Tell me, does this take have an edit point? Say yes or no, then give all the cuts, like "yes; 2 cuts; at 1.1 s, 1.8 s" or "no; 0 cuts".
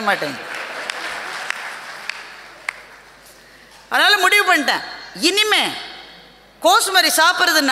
no; 0 cuts